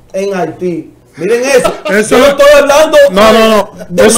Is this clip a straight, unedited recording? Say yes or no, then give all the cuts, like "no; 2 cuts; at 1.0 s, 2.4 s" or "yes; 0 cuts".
no; 1 cut; at 1.0 s